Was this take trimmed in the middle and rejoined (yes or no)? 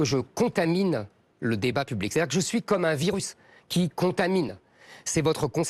no